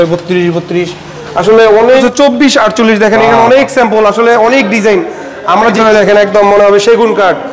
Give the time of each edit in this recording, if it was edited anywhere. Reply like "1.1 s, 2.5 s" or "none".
2.0 s, 5.7 s